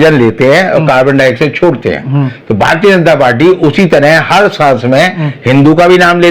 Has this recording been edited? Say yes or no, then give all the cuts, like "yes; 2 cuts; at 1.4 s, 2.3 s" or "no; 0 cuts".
no; 0 cuts